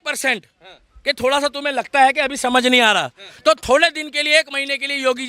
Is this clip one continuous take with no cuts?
yes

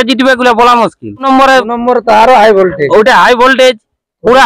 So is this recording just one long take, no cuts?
no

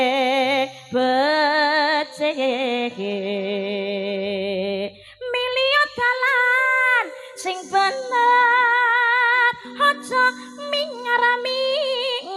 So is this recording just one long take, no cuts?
yes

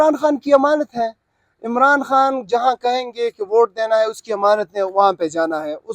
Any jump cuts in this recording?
no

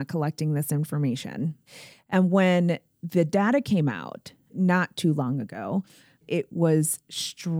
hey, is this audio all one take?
no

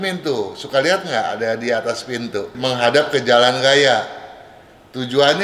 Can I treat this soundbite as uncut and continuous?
no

